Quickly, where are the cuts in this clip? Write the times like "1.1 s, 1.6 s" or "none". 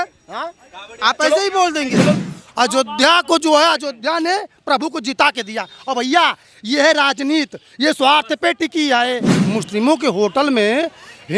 2.1 s, 9.3 s